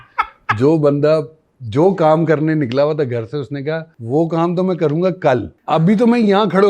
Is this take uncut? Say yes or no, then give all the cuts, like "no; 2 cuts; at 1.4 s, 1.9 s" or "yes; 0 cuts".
no; 2 cuts; at 3.9 s, 5.5 s